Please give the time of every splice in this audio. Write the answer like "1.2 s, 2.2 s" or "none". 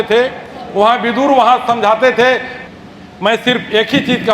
2.5 s